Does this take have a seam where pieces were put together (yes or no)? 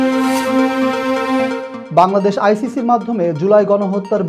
no